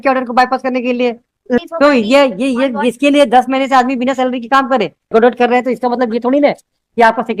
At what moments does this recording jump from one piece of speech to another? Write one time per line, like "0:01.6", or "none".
0:01.6
0:05.1